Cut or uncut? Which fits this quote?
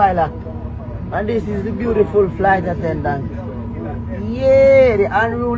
uncut